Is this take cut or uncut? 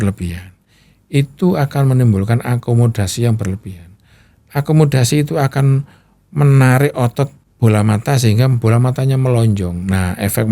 cut